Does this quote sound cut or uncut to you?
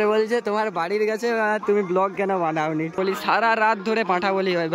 cut